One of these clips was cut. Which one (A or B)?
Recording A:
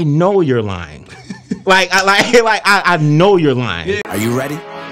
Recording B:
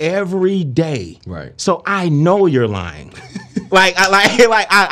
A